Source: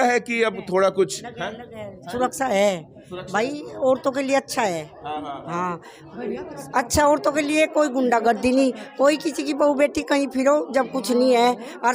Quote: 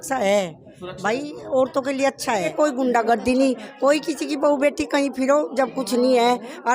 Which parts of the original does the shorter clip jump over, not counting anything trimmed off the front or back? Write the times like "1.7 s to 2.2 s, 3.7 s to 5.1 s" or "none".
4.8 s to 7.7 s